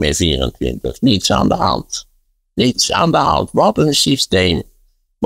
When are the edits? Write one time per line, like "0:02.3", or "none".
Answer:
none